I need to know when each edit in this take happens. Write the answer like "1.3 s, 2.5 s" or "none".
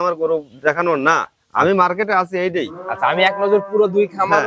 none

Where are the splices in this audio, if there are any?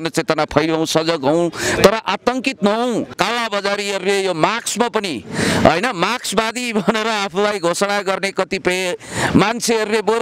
3.1 s

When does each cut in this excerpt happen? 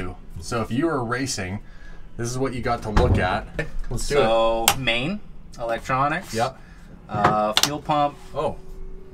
none

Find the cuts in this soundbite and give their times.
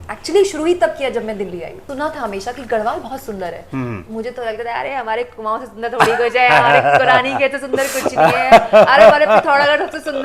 1.9 s

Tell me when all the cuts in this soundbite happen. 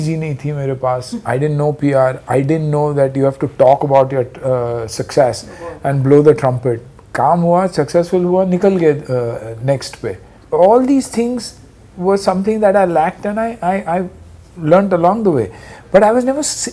none

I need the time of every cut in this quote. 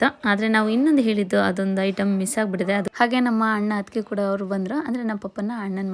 2.9 s

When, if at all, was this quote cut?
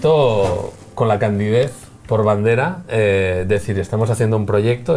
2.4 s

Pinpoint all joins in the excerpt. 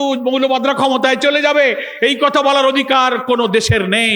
none

